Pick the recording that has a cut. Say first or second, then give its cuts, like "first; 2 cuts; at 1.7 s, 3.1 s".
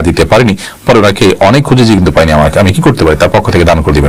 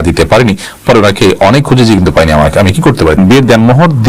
second; 1 cut; at 3.2 s